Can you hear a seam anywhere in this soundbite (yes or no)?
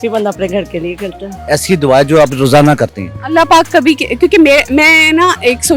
yes